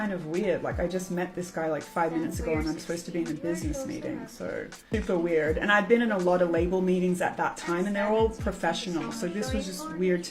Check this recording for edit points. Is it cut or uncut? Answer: cut